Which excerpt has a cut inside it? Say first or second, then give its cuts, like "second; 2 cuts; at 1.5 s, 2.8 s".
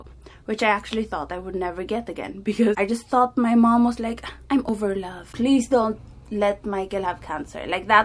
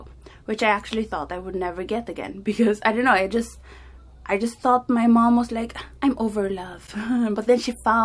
first; 2 cuts; at 2.8 s, 4.7 s